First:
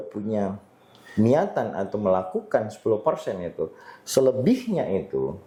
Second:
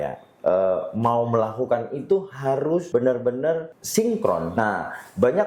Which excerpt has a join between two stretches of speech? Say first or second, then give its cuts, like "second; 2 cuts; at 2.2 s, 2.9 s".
second; 3 cuts; at 2.9 s, 3.8 s, 4.5 s